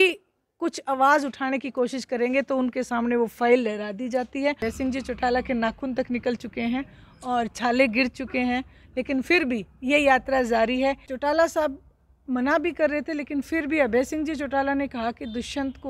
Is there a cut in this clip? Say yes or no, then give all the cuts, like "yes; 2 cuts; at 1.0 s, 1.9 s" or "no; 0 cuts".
yes; 2 cuts; at 4.6 s, 11.1 s